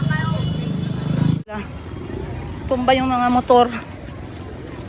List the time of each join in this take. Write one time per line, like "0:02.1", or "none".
0:01.5